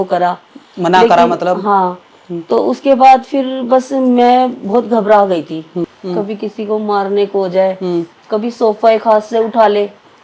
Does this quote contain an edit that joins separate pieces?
yes; 1 cut; at 5.9 s

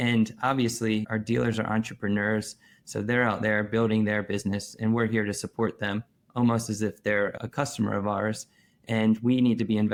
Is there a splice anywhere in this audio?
no; 0 cuts

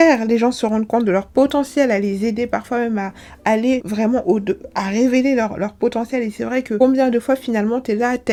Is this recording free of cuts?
yes; 0 cuts

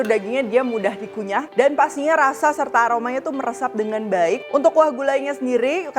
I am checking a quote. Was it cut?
yes; 2 cuts; at 1.5 s, 4.4 s

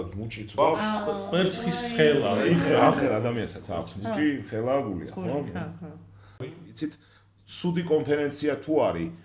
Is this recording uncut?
no; 1 cut; at 6.6 s

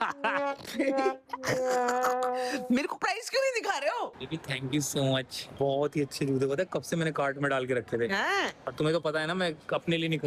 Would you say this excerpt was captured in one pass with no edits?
no; 2 cuts; at 4.2 s, 5.4 s

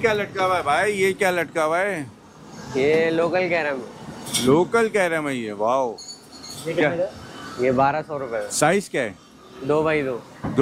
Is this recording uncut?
yes; 0 cuts

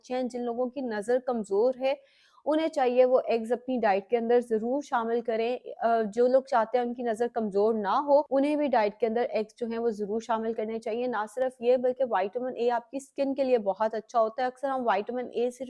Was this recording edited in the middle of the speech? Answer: yes; 1 cut; at 8.3 s

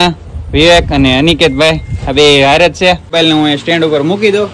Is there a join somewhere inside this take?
yes; 1 cut; at 3.1 s

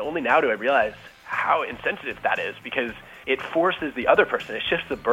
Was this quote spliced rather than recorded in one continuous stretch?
yes; 2 cuts; at 2.2 s, 3.1 s

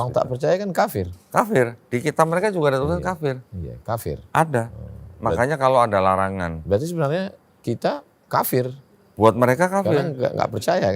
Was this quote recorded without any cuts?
yes; 0 cuts

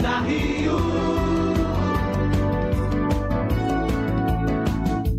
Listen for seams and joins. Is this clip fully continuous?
yes; 0 cuts

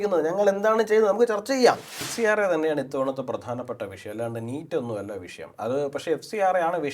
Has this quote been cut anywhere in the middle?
yes; 1 cut; at 2.0 s

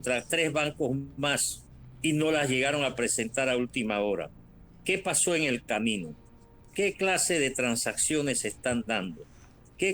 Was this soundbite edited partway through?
no; 0 cuts

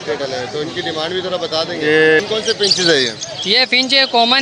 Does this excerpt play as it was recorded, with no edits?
no; 1 cut; at 2.2 s

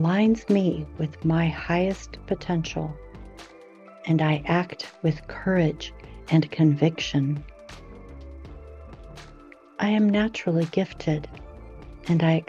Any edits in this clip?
no; 0 cuts

